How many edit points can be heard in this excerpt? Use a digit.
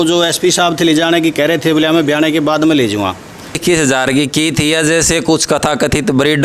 1